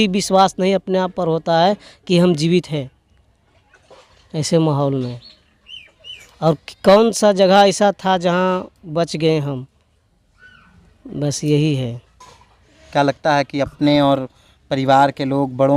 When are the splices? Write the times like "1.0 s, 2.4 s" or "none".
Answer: none